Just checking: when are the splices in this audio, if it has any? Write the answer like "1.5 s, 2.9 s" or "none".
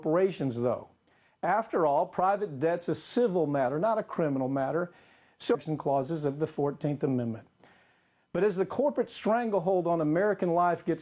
none